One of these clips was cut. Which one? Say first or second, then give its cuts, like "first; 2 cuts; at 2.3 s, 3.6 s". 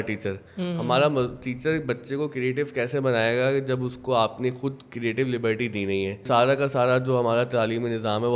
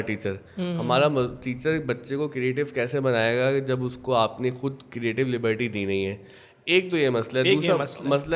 first; 1 cut; at 6.2 s